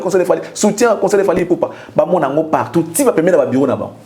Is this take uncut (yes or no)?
yes